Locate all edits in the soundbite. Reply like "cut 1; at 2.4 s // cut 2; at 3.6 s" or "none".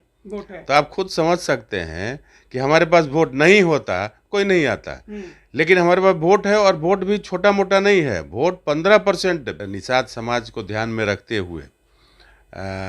cut 1; at 9.5 s